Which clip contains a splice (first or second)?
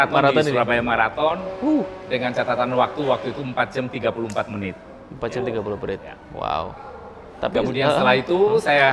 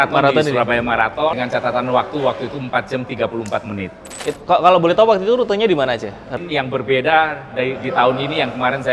second